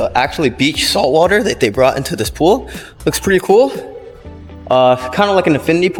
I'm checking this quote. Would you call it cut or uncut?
uncut